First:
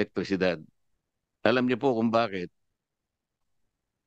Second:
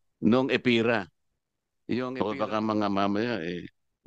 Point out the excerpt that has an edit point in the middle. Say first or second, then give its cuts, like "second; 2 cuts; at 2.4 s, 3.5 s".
second; 1 cut; at 2.1 s